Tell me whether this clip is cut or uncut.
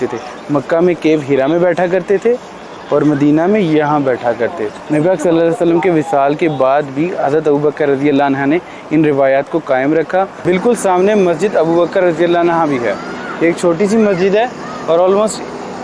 cut